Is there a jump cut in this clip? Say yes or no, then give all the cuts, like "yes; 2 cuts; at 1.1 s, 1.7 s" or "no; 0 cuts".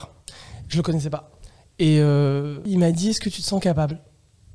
yes; 1 cut; at 2.6 s